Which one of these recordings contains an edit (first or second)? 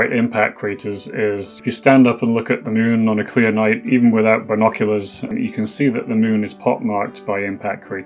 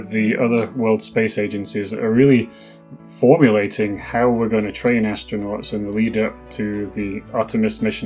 first